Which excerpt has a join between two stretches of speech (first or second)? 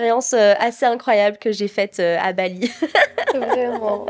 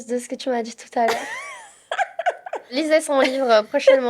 second